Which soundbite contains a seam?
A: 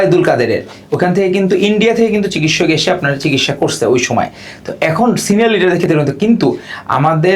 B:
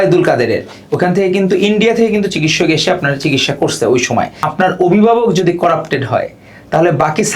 B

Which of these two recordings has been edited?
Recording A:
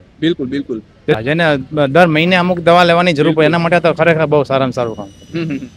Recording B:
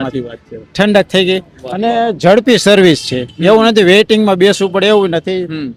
A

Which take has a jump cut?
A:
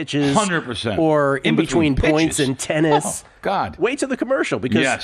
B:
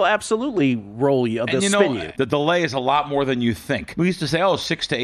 B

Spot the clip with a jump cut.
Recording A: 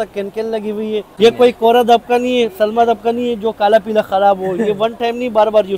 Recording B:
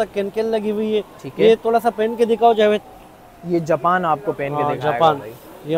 A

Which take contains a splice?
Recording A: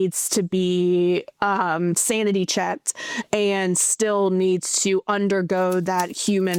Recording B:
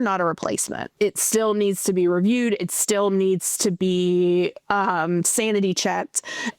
B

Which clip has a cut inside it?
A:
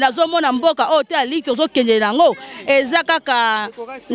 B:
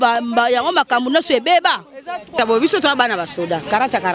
B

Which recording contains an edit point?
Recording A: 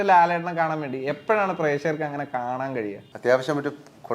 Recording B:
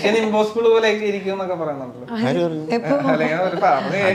A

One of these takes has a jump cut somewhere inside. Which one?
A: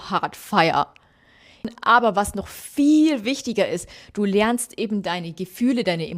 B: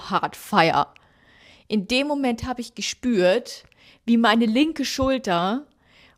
A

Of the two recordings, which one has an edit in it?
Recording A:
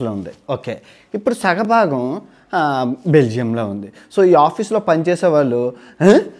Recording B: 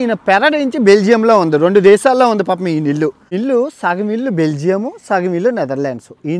B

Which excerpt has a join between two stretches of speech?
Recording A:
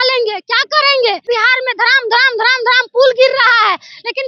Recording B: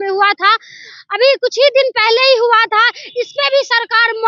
A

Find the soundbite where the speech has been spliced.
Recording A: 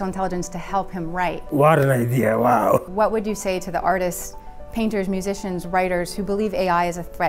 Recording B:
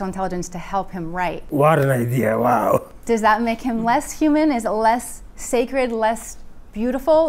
A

